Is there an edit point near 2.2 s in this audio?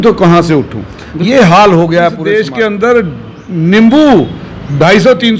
yes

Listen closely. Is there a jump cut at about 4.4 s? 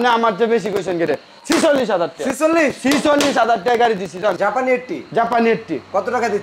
yes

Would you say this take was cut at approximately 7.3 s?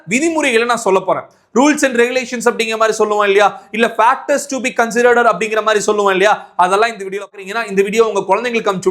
yes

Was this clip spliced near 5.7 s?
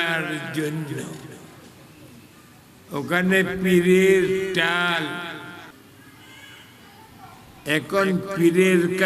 yes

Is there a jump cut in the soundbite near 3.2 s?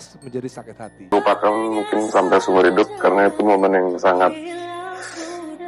no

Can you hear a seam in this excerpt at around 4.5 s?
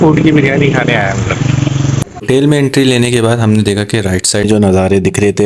yes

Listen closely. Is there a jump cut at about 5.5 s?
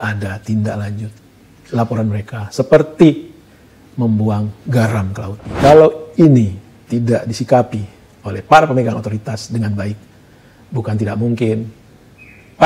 yes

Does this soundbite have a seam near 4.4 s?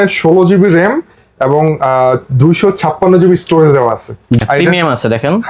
yes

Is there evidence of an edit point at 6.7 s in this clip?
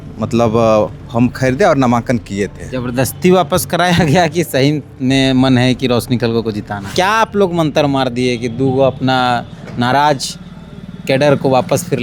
yes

